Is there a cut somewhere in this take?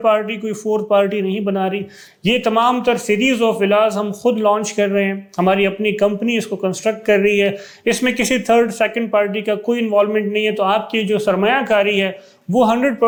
no; 0 cuts

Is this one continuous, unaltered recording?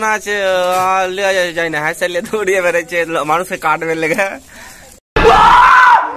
yes; 0 cuts

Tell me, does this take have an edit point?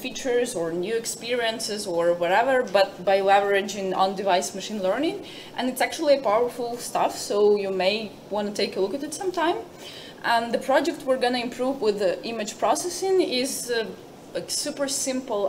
no; 0 cuts

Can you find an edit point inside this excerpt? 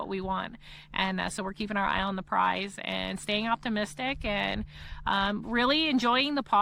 no; 0 cuts

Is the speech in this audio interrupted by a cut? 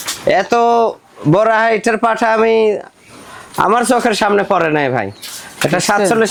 no; 0 cuts

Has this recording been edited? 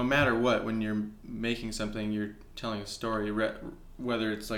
no; 0 cuts

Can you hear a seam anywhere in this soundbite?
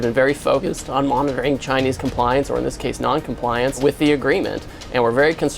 yes; 1 cut; at 3.8 s

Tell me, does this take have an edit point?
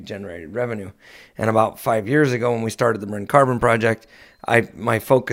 no; 0 cuts

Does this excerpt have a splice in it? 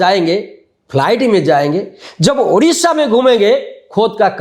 no; 0 cuts

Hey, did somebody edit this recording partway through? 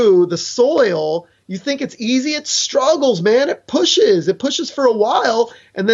no; 0 cuts

